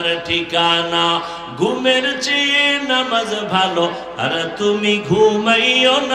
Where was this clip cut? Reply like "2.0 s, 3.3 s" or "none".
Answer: none

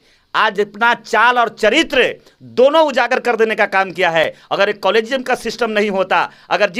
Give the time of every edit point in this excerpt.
none

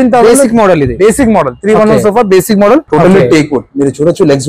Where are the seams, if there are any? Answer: 2.9 s

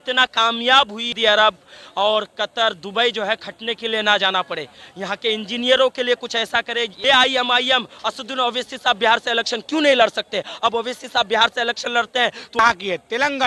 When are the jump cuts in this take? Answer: 1.1 s, 6.9 s, 12.6 s

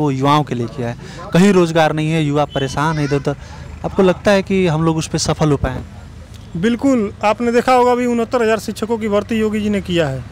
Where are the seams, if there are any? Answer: none

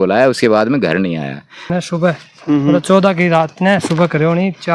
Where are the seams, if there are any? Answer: 1.7 s

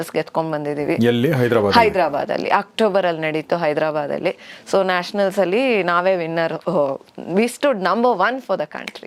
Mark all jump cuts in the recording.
none

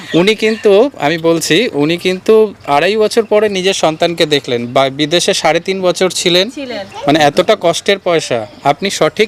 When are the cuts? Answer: none

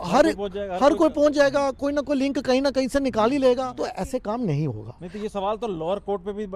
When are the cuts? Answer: 3.8 s

